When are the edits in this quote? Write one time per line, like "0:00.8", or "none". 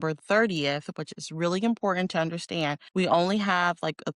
0:02.8